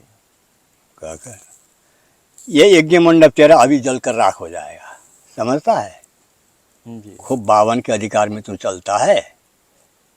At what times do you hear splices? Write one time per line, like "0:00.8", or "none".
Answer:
none